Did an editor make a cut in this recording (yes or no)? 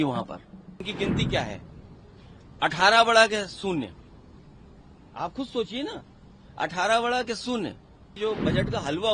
yes